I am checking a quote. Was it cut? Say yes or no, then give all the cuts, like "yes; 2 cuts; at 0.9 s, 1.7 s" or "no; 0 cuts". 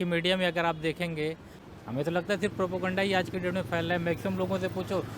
yes; 1 cut; at 1.5 s